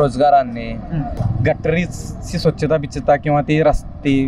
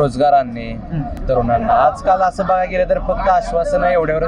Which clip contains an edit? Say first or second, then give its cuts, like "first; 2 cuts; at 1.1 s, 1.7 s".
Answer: first; 1 cut; at 1.1 s